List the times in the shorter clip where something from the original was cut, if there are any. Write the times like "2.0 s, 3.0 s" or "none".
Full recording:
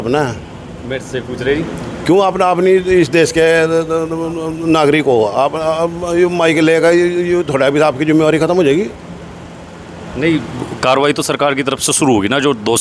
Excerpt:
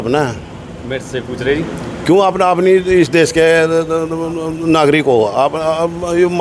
none